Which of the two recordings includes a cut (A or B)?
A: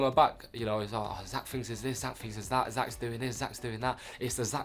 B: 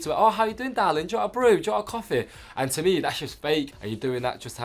B